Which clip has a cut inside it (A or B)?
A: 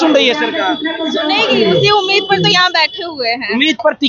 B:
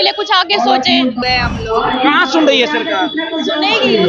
B